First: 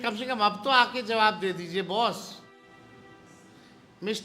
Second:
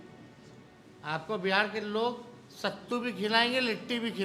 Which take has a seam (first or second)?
first